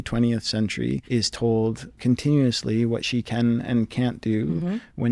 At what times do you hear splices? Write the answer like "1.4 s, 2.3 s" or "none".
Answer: 1.0 s, 1.9 s